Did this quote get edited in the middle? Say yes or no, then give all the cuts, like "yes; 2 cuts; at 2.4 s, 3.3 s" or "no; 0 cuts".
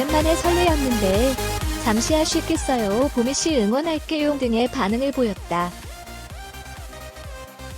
yes; 1 cut; at 5.7 s